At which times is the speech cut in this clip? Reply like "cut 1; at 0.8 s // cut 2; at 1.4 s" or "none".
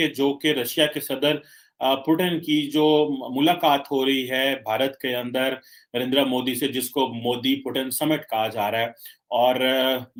none